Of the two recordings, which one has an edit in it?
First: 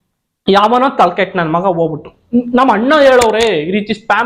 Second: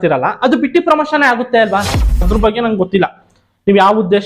second; 1 cut; at 2.3 s

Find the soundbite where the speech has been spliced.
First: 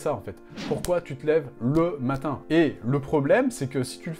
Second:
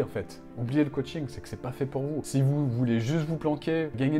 first; 1 cut; at 2.4 s

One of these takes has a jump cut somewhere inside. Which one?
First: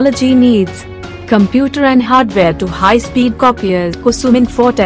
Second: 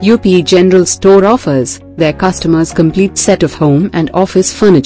first; 1 cut; at 4.0 s

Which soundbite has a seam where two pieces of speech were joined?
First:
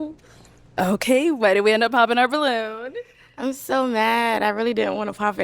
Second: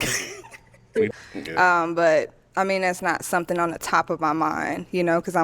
second; 1 cut; at 1.1 s

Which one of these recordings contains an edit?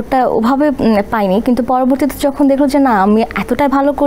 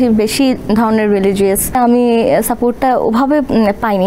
second; 1 cut; at 1.8 s

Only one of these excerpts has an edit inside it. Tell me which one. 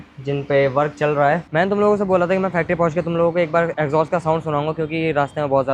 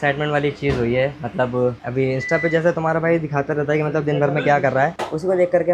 first; 1 cut; at 1.4 s

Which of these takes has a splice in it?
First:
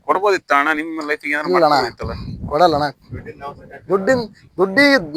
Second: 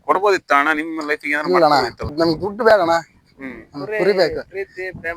second; 1 cut; at 2.1 s

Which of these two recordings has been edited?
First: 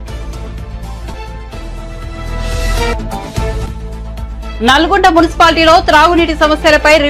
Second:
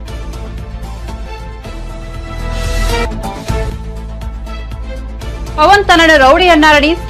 second; 1 cut; at 1.0 s

